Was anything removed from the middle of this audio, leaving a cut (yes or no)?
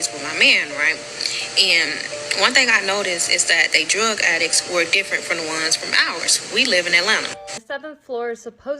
yes